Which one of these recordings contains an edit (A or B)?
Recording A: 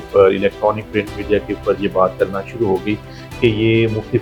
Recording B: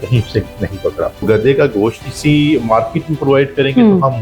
B